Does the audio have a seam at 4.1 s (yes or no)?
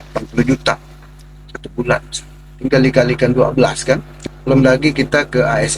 yes